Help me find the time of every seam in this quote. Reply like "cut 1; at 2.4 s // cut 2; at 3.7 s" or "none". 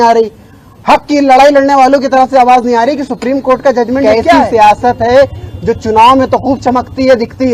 cut 1; at 4.2 s

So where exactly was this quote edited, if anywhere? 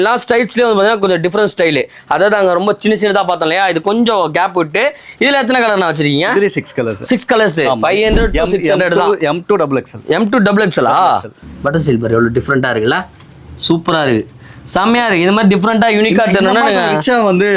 cut 1; at 11.5 s

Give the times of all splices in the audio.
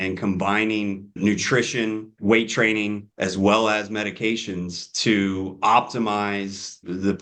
none

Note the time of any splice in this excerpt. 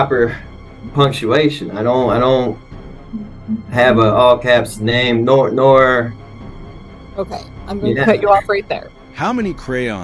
none

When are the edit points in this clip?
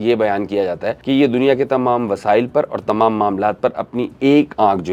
cut 1; at 0.9 s

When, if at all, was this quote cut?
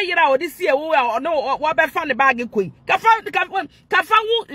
none

